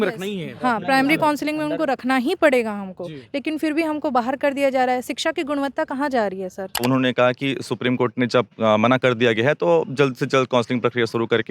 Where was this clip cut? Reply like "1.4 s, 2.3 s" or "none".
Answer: 6.8 s